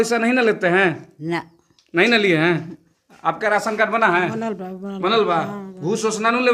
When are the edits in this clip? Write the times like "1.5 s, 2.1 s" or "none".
none

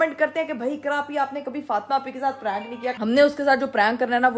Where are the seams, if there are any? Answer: 3.0 s

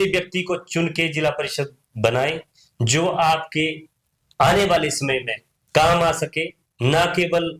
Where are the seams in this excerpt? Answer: none

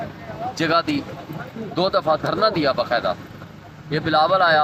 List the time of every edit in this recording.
none

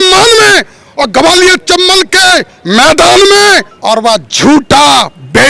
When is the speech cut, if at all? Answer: 3.7 s

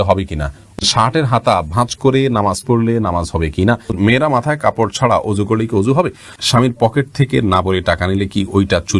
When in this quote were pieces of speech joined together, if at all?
0.8 s, 3.9 s, 6.3 s

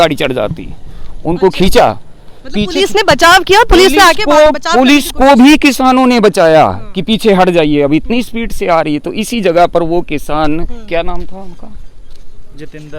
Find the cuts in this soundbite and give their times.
none

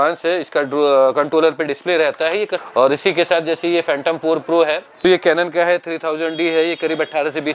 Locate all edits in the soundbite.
2.6 s, 4.9 s

